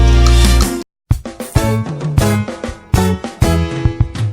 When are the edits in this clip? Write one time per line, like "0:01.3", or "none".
0:01.0